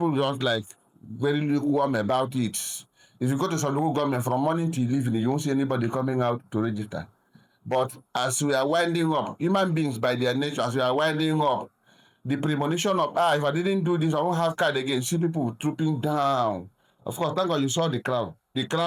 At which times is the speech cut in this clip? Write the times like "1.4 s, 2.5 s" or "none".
none

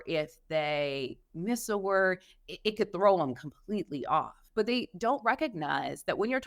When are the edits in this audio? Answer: none

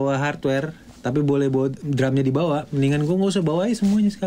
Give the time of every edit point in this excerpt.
1.8 s

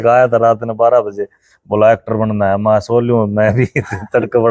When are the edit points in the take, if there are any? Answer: none

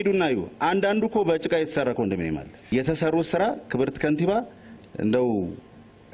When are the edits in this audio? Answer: 2.7 s

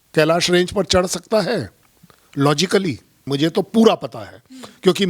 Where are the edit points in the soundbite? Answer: 3.3 s

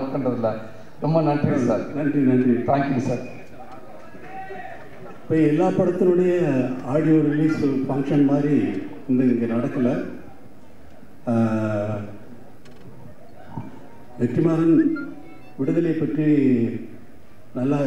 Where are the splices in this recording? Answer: none

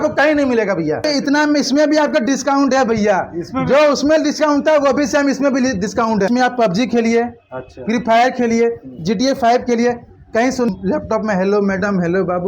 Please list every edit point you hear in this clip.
1.1 s, 6.3 s, 10.7 s

